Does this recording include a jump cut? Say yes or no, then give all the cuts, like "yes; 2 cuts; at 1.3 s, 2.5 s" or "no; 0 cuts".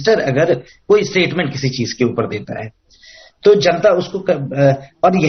no; 0 cuts